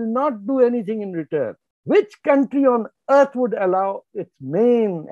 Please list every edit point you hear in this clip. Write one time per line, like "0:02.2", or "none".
0:01.7